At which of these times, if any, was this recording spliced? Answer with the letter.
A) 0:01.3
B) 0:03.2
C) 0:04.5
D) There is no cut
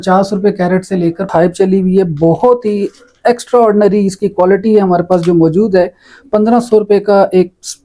A